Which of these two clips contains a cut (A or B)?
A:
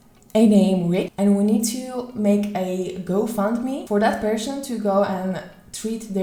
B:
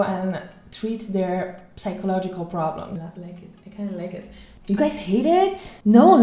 B